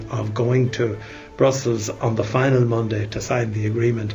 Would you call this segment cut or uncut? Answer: uncut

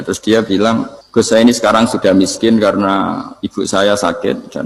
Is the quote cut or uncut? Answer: cut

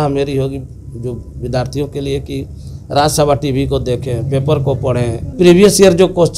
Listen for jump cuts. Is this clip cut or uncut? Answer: cut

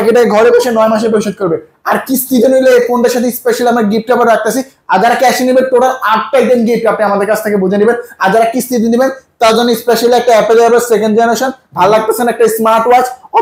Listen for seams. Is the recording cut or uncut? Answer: uncut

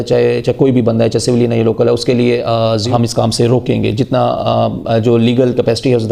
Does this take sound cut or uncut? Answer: cut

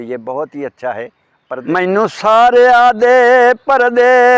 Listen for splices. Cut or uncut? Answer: cut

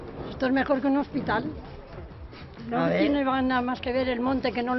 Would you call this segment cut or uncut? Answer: uncut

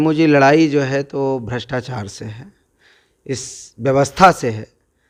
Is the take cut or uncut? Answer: uncut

